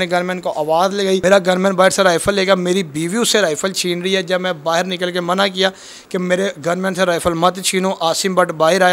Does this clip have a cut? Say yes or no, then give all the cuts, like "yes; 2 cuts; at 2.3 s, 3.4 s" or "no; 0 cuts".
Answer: yes; 1 cut; at 1.2 s